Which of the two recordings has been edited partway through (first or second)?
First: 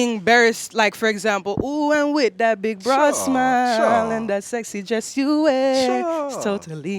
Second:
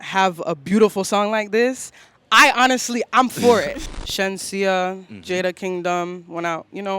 second